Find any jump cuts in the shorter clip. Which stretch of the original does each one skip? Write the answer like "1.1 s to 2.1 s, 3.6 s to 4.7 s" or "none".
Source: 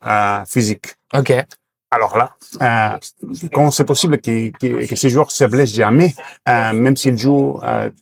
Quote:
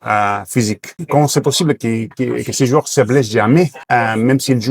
0.9 s to 3.3 s, 6.2 s to 6.3 s